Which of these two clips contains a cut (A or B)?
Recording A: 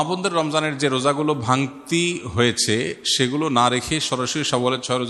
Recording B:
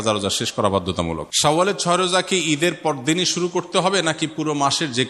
B